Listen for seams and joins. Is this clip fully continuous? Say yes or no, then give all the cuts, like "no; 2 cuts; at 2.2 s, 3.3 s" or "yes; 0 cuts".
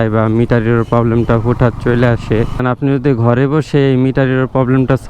no; 1 cut; at 2.6 s